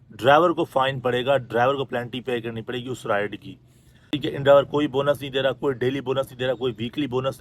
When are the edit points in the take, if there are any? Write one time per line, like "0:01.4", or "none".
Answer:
0:04.2